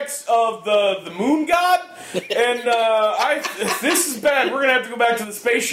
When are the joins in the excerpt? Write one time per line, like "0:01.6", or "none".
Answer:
none